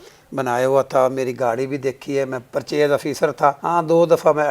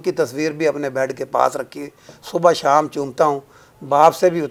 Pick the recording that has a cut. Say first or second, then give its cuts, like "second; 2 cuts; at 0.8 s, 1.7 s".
first; 2 cuts; at 2.4 s, 3.6 s